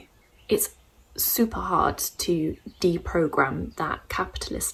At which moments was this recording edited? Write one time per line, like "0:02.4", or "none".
none